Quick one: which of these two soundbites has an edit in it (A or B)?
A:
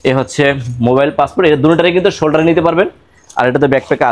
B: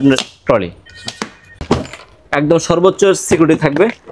B